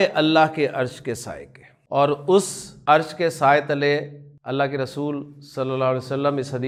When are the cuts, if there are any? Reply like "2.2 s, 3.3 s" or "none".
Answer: none